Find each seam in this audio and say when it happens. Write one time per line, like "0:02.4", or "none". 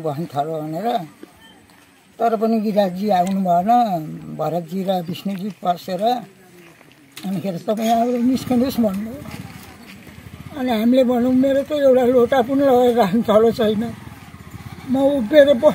none